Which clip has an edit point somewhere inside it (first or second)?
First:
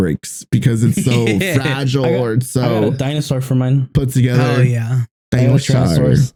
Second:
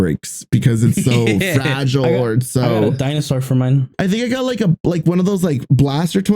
second